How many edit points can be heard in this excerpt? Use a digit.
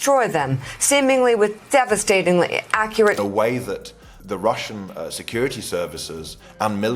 1